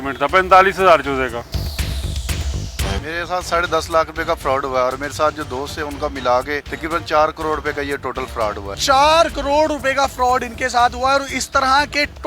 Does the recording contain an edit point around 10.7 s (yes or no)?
no